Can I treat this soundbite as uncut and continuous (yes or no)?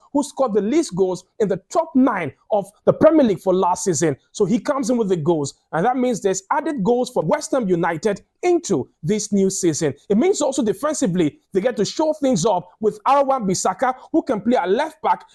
yes